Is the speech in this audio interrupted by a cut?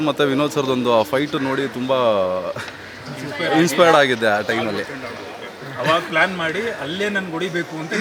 no; 0 cuts

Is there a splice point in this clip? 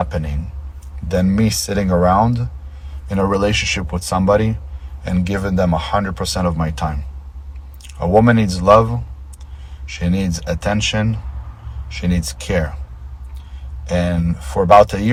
no; 0 cuts

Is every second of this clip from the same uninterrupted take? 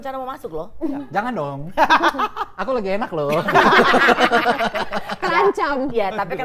yes; 0 cuts

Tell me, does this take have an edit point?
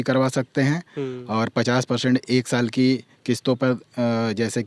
no; 0 cuts

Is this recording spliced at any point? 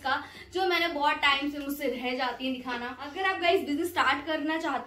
yes; 1 cut; at 3.0 s

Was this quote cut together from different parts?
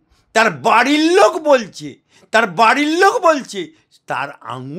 no; 0 cuts

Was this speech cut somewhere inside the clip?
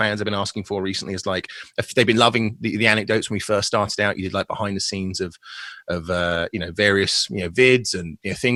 no; 0 cuts

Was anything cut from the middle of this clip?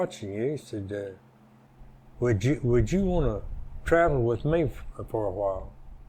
no; 0 cuts

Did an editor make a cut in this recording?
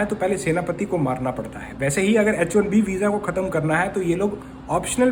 no; 0 cuts

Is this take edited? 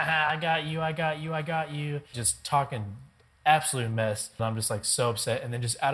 yes; 2 cuts; at 2.2 s, 4.4 s

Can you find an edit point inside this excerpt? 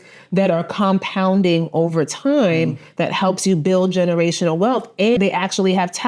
yes; 1 cut; at 5.2 s

